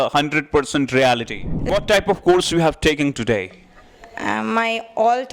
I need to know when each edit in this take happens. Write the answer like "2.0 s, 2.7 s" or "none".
1.7 s